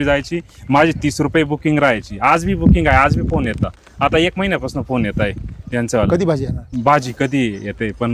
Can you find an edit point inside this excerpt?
no; 0 cuts

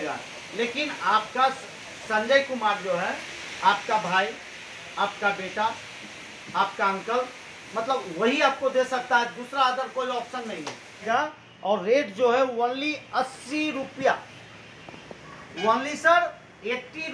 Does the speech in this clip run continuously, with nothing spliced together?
no; 1 cut; at 11.0 s

